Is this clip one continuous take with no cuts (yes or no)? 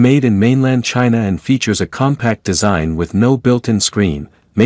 no